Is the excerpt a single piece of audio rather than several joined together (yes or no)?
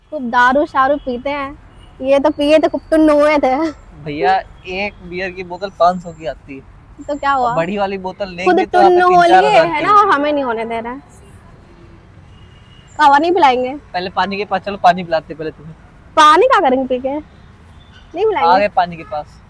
yes